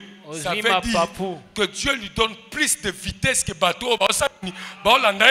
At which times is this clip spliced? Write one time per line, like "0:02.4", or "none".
none